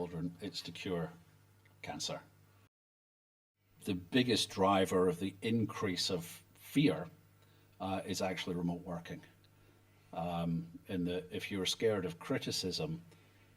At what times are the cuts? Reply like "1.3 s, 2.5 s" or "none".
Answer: 3.3 s